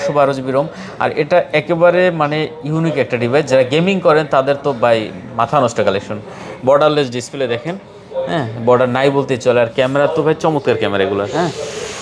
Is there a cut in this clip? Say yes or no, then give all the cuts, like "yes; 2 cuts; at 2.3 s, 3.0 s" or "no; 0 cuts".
no; 0 cuts